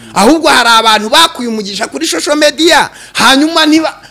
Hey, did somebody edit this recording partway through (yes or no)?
no